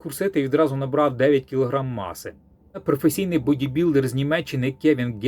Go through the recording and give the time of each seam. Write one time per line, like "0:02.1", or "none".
0:02.8